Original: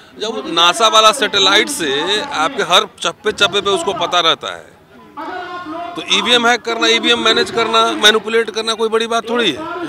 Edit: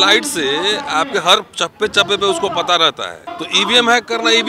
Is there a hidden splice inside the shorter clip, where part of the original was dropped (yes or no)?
yes